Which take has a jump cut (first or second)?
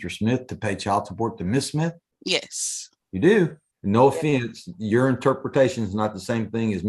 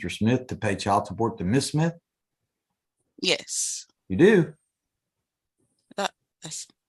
first